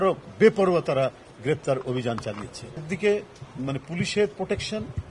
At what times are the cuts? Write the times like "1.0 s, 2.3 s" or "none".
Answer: 2.9 s